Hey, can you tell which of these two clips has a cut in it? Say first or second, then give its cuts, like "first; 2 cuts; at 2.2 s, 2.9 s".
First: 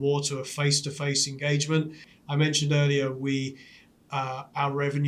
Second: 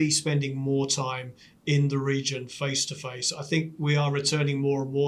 first; 1 cut; at 2.0 s